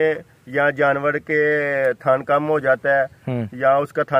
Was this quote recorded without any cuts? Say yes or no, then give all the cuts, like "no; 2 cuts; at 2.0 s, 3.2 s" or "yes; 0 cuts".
yes; 0 cuts